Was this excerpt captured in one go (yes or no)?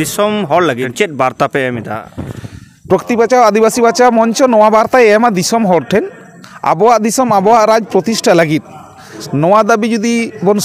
no